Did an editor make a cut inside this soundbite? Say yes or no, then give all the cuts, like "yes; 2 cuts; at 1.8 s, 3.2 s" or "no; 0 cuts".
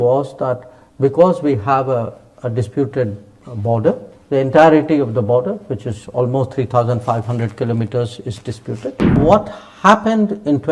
yes; 1 cut; at 9.2 s